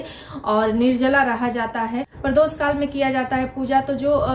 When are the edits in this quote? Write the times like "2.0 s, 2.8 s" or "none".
2.1 s

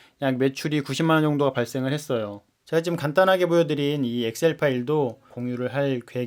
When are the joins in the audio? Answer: 2.5 s, 5.3 s

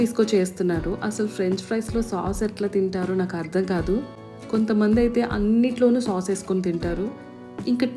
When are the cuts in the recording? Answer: none

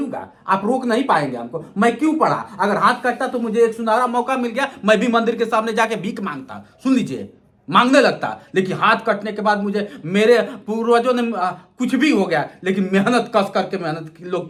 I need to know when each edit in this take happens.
none

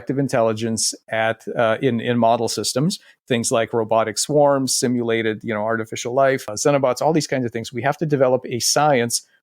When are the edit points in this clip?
6.5 s

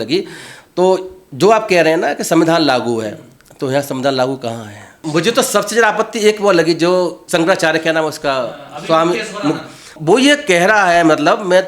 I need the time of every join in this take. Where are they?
5.0 s

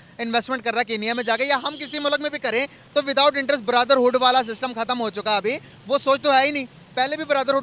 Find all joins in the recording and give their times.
none

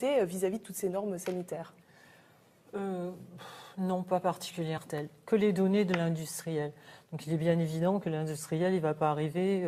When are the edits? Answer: none

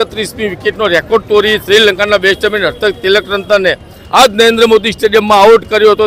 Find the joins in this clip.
none

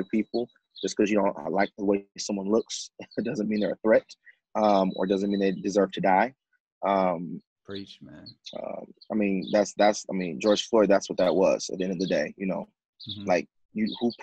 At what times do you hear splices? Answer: none

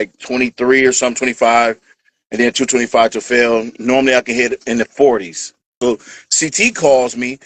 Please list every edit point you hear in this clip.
5.8 s

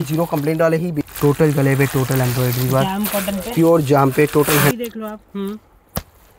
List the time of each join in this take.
1.0 s, 4.7 s

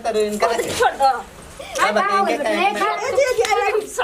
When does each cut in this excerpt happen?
3.0 s

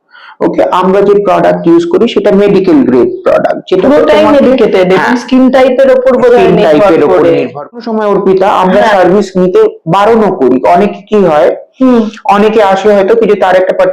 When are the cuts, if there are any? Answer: 7.8 s

